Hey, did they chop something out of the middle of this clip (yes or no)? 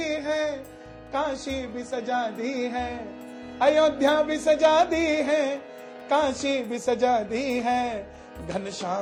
no